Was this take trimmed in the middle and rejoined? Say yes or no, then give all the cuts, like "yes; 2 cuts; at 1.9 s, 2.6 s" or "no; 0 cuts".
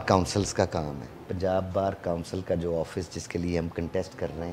yes; 1 cut; at 1.3 s